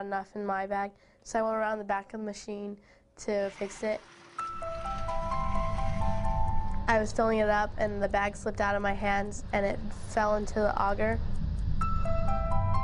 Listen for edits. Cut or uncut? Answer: uncut